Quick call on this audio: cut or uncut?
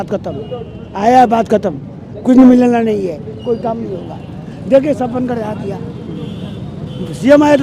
uncut